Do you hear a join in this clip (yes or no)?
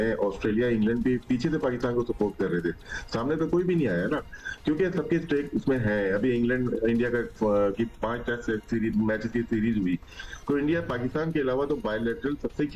no